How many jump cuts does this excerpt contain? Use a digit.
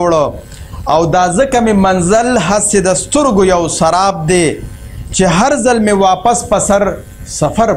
0